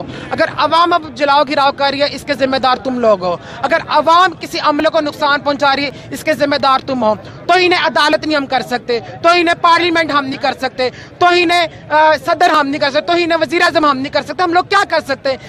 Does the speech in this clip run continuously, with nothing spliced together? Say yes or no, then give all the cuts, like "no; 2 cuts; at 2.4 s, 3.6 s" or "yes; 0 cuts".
yes; 0 cuts